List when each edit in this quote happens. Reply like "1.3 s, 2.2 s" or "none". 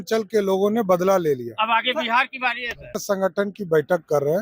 3.0 s